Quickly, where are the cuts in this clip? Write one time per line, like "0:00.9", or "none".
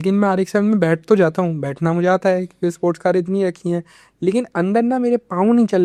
none